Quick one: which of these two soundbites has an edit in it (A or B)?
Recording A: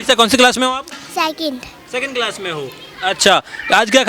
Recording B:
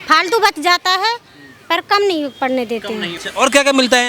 B